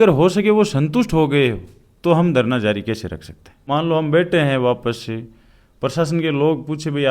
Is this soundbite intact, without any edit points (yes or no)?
no